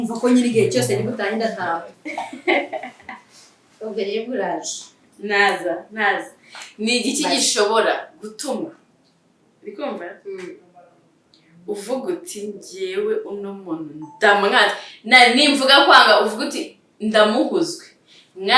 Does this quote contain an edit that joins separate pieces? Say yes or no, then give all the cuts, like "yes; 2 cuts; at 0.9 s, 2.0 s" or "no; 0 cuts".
yes; 1 cut; at 1.9 s